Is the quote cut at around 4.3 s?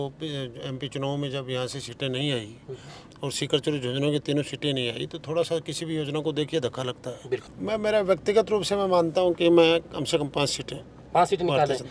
no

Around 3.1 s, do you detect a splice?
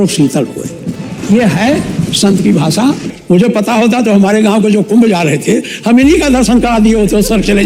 yes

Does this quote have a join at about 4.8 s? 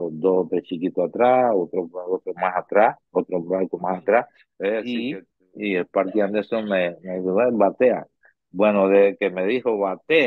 yes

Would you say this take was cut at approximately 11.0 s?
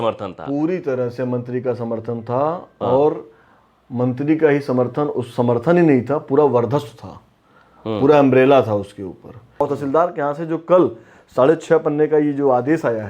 no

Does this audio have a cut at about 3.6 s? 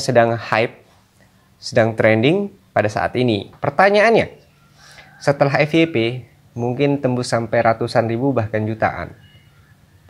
yes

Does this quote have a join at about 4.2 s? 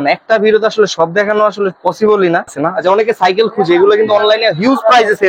no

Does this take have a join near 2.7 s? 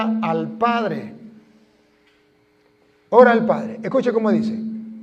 no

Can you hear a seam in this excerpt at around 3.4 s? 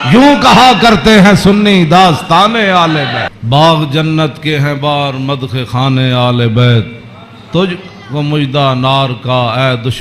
yes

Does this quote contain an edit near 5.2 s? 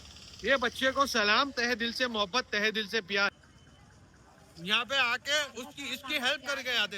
no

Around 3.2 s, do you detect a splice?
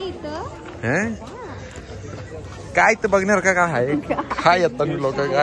no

